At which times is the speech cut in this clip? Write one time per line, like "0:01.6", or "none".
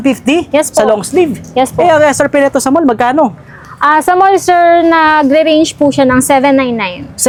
none